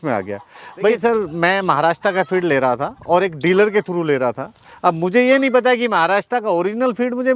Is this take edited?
yes; 1 cut; at 1.0 s

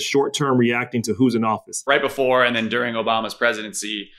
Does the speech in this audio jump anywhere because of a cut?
yes; 1 cut; at 1.9 s

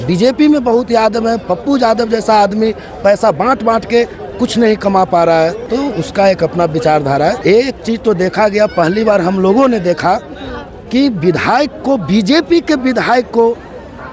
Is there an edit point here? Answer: yes; 2 cuts; at 5.6 s, 7.4 s

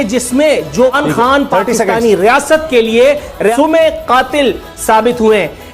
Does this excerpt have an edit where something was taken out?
yes; 2 cuts; at 1.0 s, 3.5 s

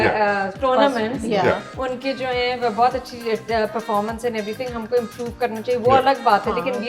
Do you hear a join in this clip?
no; 0 cuts

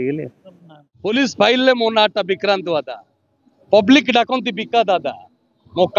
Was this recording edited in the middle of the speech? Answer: yes; 1 cut; at 1.1 s

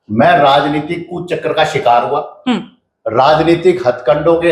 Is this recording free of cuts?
yes; 0 cuts

